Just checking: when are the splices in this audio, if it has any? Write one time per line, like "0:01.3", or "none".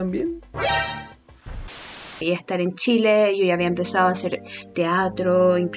0:02.2